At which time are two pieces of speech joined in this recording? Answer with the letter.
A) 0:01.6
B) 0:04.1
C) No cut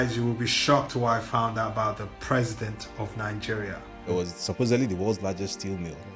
B